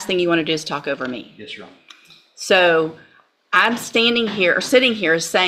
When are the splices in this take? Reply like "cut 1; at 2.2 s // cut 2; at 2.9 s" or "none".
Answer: none